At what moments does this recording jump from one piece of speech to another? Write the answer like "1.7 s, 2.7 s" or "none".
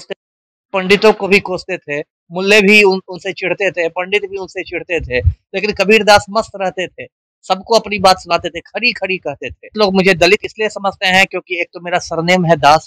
9.7 s